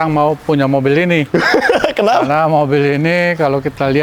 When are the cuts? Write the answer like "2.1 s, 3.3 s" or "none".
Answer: none